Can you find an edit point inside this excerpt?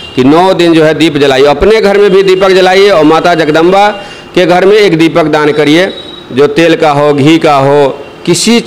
no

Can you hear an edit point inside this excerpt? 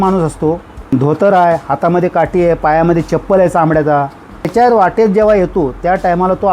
yes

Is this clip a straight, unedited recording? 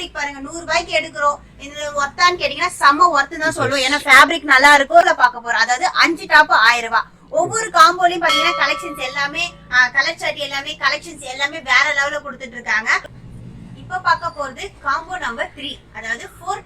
no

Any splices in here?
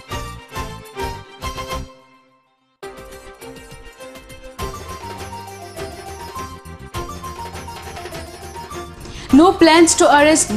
yes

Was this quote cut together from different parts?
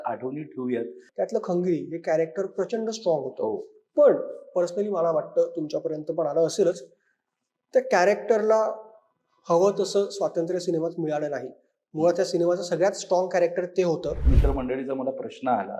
yes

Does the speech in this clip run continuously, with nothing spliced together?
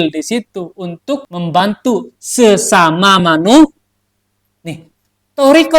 no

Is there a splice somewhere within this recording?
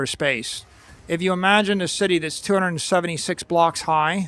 no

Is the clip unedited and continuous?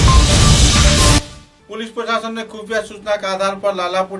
no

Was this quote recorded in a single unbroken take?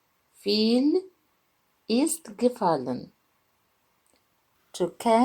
no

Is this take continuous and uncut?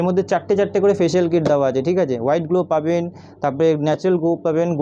yes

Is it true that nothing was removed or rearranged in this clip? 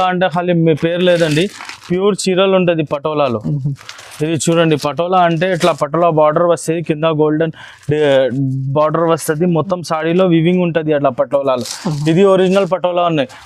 yes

